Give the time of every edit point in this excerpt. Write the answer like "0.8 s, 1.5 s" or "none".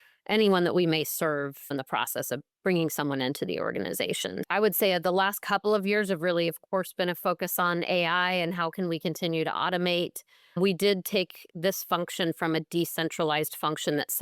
4.4 s